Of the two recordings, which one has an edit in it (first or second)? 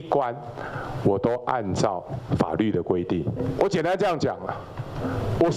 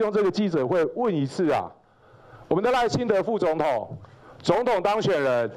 first